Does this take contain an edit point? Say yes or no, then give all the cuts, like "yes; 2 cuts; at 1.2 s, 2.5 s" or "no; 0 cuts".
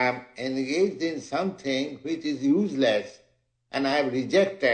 no; 0 cuts